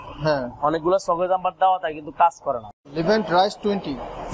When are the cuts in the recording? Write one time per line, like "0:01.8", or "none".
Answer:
0:02.8